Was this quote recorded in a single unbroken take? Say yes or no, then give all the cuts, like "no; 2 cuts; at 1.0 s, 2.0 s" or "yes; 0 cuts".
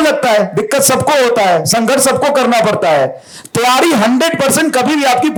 yes; 0 cuts